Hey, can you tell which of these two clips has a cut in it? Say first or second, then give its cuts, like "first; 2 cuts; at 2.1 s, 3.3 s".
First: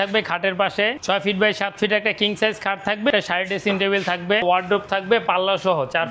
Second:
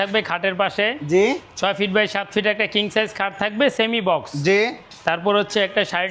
first; 3 cuts; at 1.0 s, 3.1 s, 4.4 s